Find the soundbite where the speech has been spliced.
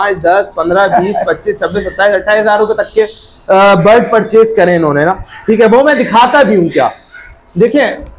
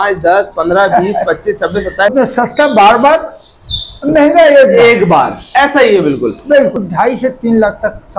second; 2 cuts; at 2.1 s, 6.9 s

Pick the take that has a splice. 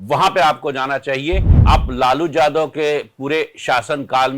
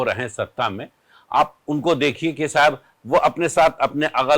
first; 1 cut; at 1.5 s

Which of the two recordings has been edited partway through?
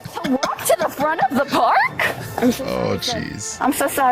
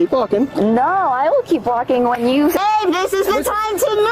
second; 1 cut; at 2.6 s

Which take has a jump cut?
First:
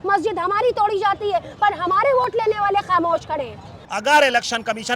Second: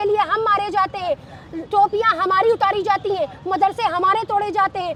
first; 1 cut; at 3.8 s

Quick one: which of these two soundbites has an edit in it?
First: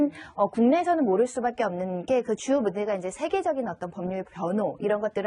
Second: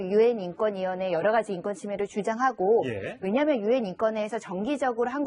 second; 1 cut; at 4.3 s

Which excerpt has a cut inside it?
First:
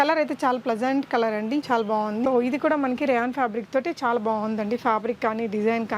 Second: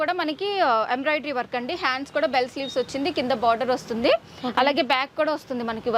first; 1 cut; at 2.2 s

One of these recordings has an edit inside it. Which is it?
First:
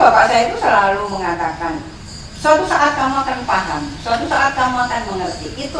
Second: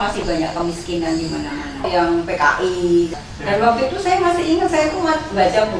second; 2 cuts; at 1.9 s, 3.2 s

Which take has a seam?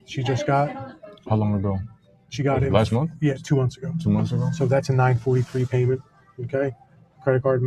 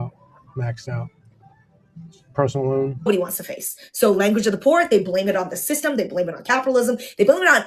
second; 1 cut; at 3.1 s

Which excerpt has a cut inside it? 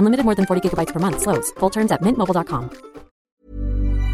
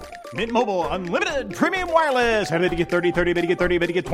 first; 1 cut; at 3.2 s

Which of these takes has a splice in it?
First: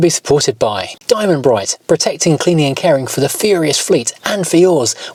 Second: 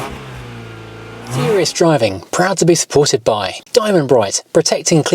second; 1 cut; at 1.4 s

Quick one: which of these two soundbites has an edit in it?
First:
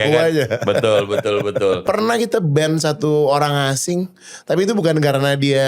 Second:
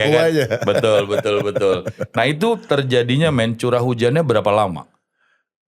first; 1 cut; at 1.8 s

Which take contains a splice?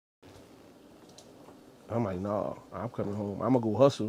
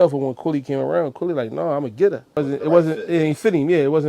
second; 1 cut; at 2.4 s

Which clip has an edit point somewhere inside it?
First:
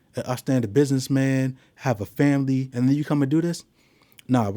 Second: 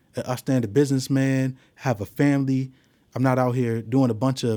first; 1 cut; at 2.7 s

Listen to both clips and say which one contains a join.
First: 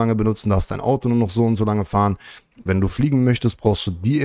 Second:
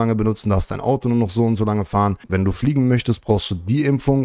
second; 1 cut; at 2.2 s

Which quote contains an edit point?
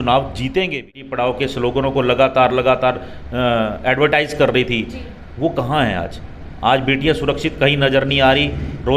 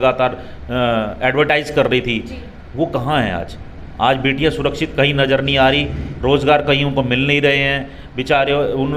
first; 1 cut; at 1.1 s

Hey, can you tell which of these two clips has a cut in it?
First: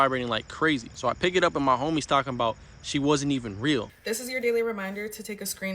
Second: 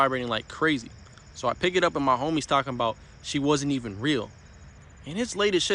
first; 2 cuts; at 0.9 s, 3.9 s

